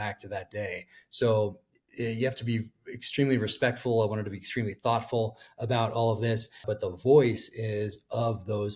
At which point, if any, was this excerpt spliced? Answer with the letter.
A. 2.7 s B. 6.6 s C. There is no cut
B